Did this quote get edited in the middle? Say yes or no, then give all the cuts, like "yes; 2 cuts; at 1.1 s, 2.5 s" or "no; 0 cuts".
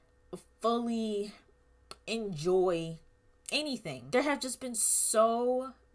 yes; 1 cut; at 3.9 s